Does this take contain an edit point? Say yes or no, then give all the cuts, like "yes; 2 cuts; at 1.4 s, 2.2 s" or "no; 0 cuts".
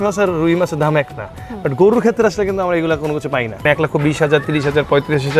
yes; 1 cut; at 3.6 s